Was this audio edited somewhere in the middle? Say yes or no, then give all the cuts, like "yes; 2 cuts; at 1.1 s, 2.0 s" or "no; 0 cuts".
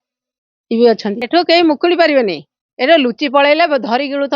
yes; 1 cut; at 1.2 s